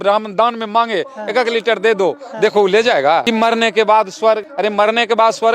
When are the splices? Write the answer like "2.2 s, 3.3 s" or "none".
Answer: 3.2 s, 4.5 s